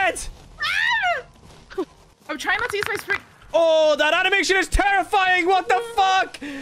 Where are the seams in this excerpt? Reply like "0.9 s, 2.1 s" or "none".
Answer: 2.1 s